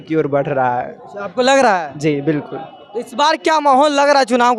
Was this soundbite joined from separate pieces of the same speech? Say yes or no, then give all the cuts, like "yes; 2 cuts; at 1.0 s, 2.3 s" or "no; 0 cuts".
no; 0 cuts